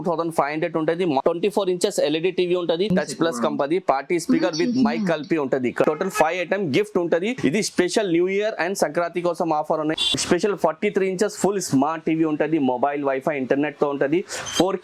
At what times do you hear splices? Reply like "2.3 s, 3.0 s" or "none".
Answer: 1.2 s, 2.9 s, 5.8 s, 7.3 s, 10.1 s